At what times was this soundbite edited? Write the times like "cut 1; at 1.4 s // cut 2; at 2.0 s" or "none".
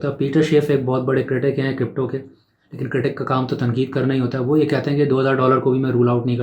none

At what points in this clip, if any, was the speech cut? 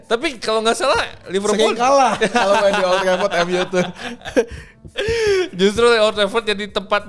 none

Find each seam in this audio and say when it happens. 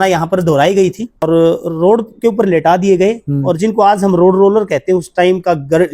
cut 1; at 1.2 s

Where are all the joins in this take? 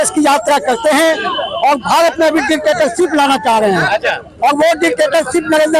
none

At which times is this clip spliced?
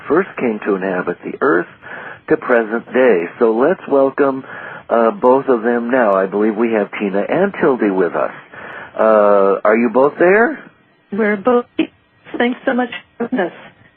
cut 1; at 1.6 s

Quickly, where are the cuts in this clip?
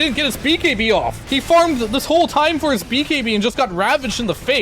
cut 1; at 1.2 s

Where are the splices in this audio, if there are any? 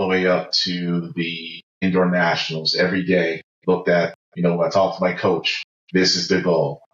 cut 1; at 1.8 s // cut 2; at 4.2 s

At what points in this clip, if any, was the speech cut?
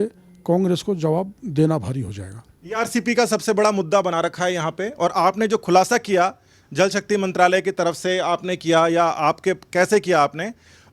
none

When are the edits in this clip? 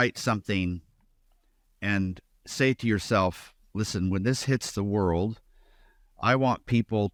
none

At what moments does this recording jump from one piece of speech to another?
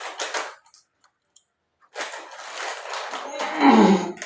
cut 1; at 2.6 s

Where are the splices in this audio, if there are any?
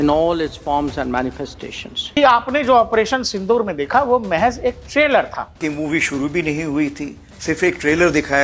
cut 1; at 2.0 s // cut 2; at 5.6 s

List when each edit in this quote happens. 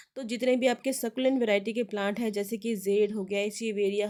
none

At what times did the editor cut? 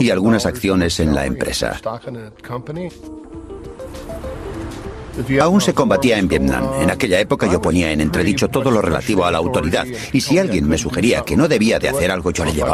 none

